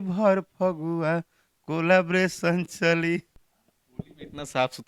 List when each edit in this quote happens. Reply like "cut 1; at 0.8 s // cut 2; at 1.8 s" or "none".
none